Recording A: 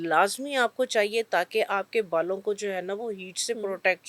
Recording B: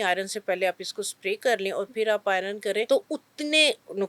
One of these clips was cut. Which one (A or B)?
B